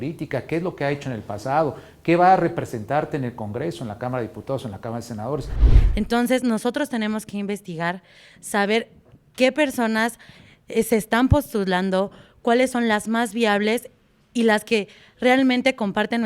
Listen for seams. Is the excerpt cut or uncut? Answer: cut